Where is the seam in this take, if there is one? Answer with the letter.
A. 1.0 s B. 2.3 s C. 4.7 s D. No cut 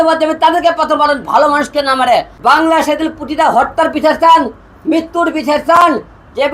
B